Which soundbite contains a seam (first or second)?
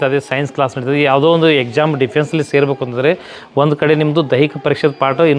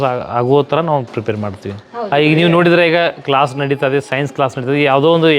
second